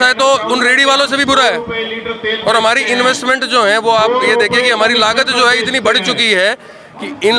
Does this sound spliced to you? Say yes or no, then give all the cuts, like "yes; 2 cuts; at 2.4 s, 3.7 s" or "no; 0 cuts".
no; 0 cuts